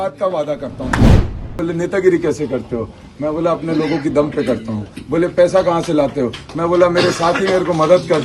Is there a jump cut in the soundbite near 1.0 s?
yes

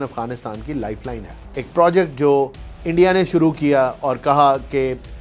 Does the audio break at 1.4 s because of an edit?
yes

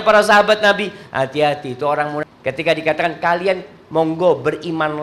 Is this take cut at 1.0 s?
no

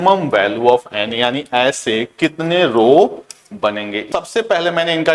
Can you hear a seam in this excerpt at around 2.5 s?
no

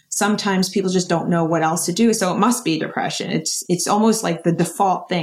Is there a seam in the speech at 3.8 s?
no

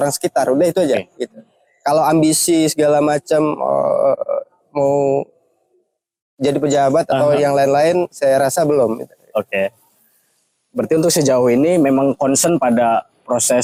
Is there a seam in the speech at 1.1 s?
no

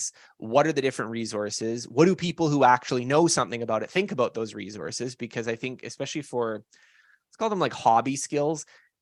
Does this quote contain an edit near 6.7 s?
no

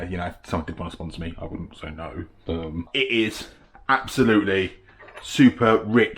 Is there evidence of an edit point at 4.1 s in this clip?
no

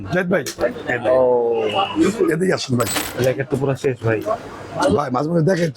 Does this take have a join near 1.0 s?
no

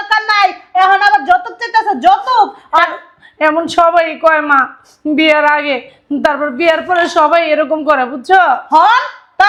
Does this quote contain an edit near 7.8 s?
no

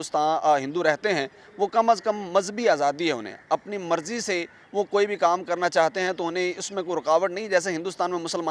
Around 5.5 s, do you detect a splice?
no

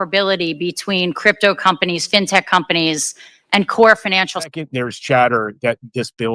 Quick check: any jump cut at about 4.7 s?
yes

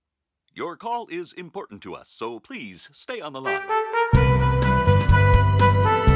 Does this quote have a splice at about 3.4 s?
yes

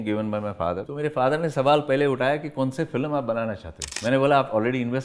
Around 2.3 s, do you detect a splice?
no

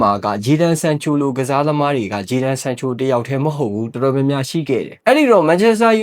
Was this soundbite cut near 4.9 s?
yes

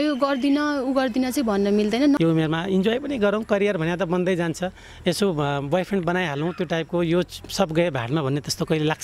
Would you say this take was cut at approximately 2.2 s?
yes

